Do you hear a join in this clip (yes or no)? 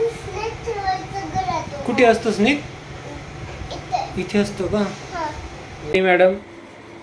yes